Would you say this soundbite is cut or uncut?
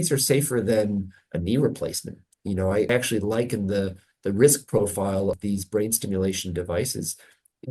cut